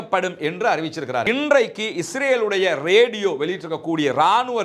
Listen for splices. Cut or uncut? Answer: cut